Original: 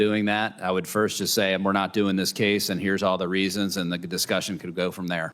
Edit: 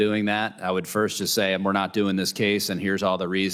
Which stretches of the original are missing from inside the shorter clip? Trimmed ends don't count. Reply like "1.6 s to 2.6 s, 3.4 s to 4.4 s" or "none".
none